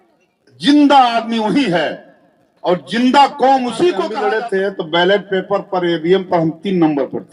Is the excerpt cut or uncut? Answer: cut